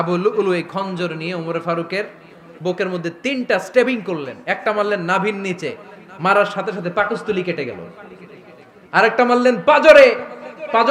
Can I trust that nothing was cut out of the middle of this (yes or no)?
yes